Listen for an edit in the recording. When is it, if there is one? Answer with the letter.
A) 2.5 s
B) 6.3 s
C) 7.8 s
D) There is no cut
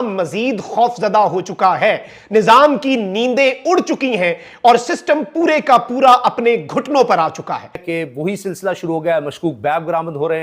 C